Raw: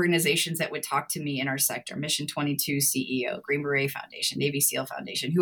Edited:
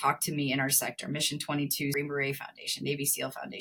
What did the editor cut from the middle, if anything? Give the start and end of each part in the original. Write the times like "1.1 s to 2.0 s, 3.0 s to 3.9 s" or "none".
2.8 s to 3.5 s

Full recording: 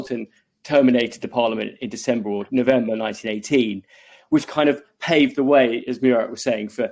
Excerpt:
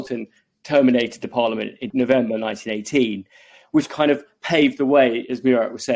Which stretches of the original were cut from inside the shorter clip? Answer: 1.8 s to 2.4 s

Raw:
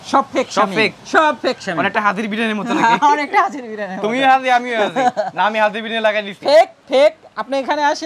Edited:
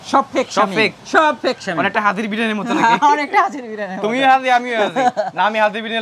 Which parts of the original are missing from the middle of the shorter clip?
none

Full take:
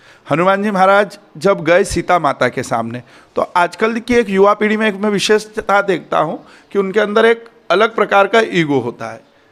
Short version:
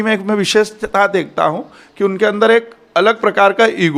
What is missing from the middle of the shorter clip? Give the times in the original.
none

